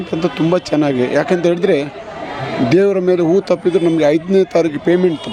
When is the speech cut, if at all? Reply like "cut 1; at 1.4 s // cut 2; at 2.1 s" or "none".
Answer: none